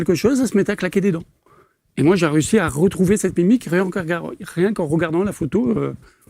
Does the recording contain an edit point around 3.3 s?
no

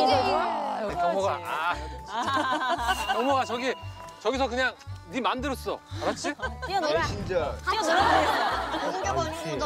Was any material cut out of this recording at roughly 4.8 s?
no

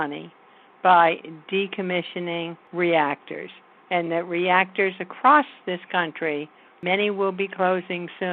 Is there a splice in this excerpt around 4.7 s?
no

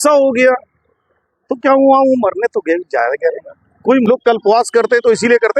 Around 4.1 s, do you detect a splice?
yes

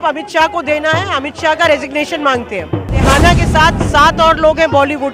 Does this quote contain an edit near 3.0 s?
yes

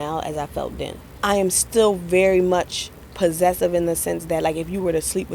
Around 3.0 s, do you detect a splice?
no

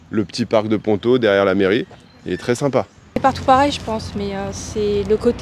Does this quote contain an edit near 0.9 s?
no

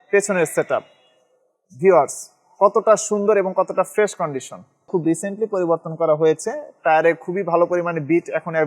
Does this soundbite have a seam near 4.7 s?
yes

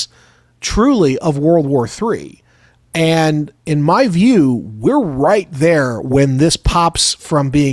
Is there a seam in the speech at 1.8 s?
no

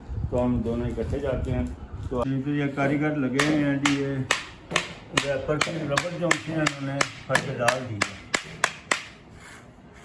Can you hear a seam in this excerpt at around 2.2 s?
yes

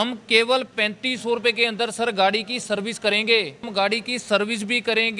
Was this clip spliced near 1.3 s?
no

